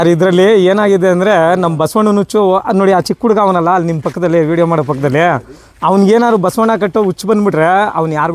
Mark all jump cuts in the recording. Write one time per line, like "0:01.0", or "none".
none